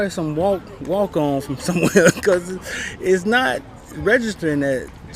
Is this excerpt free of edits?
yes; 0 cuts

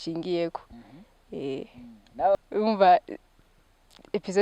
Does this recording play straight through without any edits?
no; 1 cut; at 2.4 s

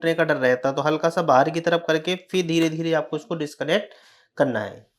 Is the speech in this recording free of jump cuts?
yes; 0 cuts

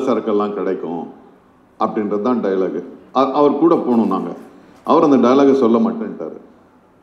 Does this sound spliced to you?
no; 0 cuts

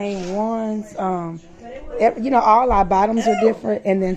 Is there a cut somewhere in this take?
no; 0 cuts

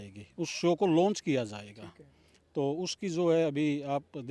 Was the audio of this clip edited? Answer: no; 0 cuts

